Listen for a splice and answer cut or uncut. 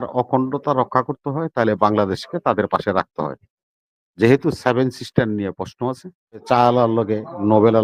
cut